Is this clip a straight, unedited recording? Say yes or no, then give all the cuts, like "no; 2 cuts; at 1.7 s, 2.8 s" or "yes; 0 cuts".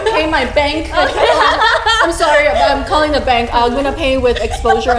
yes; 0 cuts